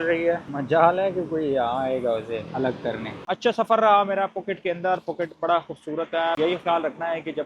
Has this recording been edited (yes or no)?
yes